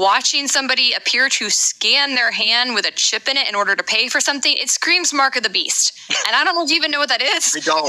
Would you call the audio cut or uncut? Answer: uncut